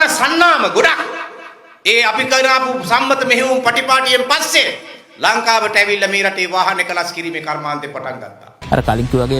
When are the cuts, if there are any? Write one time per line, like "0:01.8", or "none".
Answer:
0:08.5